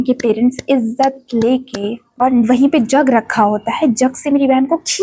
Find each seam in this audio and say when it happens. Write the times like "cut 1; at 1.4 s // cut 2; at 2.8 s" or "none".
cut 1; at 2.1 s